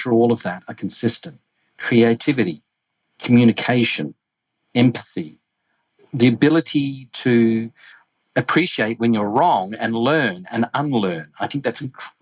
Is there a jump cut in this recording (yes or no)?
no